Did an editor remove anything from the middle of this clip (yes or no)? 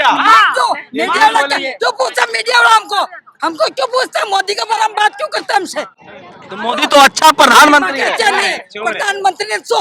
no